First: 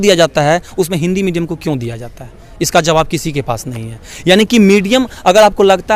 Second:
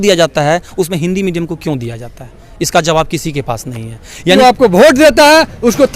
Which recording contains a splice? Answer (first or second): second